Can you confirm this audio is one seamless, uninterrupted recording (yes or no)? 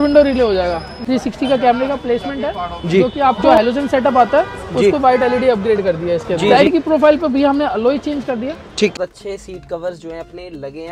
no